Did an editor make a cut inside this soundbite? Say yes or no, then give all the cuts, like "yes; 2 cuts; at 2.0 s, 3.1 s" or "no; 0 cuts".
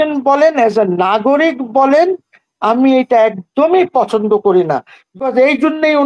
yes; 1 cut; at 5.0 s